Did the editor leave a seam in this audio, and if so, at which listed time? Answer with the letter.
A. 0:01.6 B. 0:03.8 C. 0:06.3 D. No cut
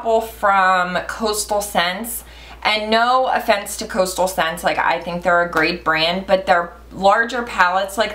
D